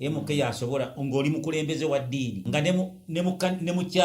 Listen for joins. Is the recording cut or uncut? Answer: cut